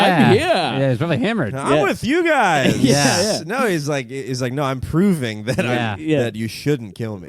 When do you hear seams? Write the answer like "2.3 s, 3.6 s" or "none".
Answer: none

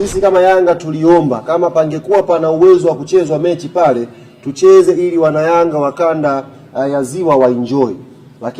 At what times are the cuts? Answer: none

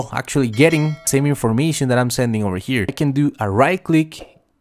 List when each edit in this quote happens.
1.0 s, 2.9 s

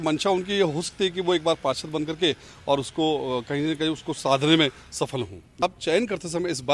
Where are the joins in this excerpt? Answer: 5.6 s

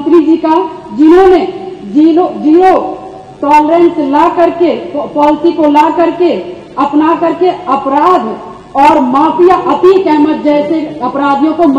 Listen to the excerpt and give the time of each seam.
none

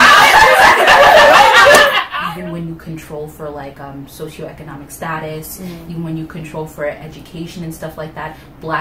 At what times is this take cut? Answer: 2.1 s

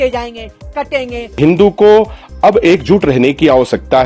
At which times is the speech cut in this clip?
1.4 s

